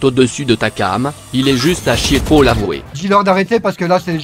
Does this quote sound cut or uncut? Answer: cut